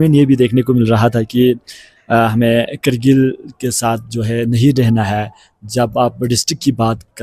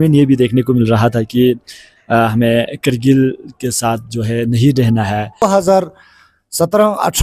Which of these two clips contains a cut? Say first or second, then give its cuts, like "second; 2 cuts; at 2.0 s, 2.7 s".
second; 1 cut; at 5.4 s